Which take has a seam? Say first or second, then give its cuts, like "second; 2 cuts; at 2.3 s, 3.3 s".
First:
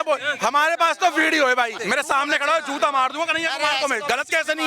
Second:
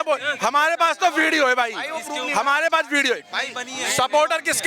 first; 1 cut; at 1.8 s